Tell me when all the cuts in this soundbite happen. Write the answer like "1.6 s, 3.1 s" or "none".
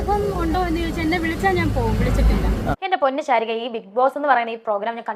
2.8 s